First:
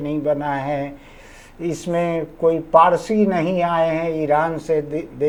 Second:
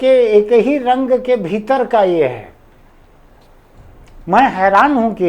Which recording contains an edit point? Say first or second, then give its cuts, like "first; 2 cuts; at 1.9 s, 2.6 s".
second; 1 cut; at 3.8 s